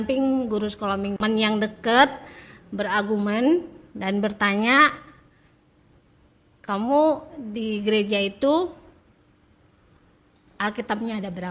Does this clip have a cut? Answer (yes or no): yes